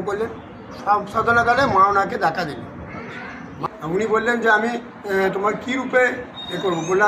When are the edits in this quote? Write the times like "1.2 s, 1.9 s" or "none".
3.7 s